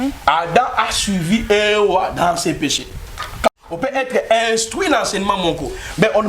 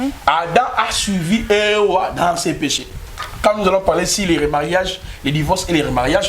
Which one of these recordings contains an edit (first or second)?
first